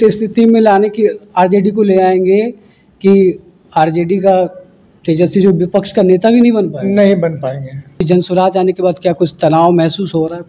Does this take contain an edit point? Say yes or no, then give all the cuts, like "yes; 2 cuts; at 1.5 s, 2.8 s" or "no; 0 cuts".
yes; 1 cut; at 8.0 s